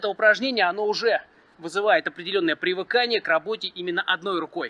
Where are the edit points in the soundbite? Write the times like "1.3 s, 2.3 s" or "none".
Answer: none

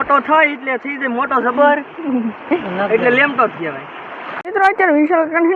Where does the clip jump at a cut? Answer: 4.5 s

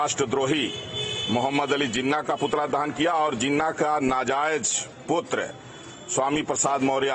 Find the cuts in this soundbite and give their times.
none

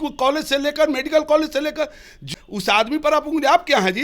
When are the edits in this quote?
2.3 s

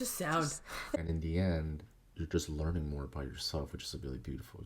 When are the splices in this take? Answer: 0.9 s

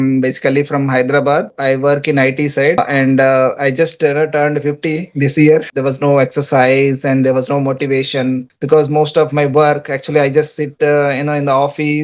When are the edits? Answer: 2.8 s, 5.7 s, 8.5 s

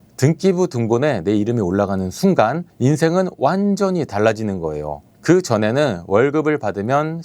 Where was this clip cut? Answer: none

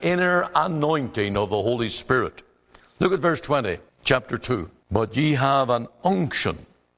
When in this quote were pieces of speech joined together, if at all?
3.9 s, 4.8 s

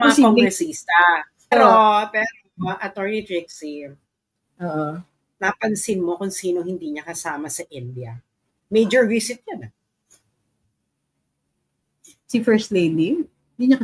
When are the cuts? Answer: 1.5 s

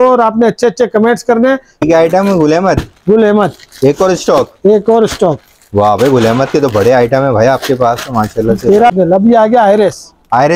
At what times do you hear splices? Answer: 1.7 s, 8.9 s

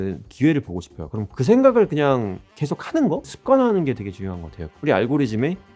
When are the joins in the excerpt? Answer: 2.9 s, 4.7 s

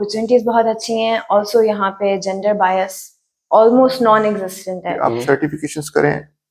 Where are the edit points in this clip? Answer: 5.1 s

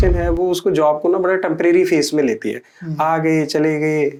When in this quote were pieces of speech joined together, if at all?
none

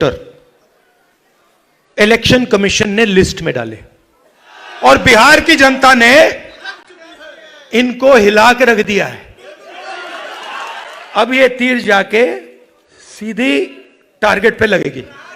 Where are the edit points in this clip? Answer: 4.5 s, 11.0 s

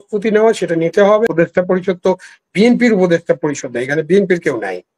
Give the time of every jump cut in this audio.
1.3 s

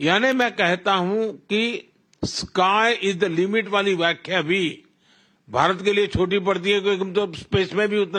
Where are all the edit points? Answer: none

